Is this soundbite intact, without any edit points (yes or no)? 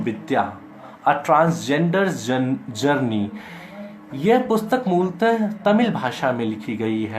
yes